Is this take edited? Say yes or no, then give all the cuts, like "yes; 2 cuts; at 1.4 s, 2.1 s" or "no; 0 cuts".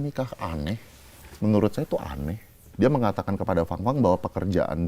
yes; 1 cut; at 2.6 s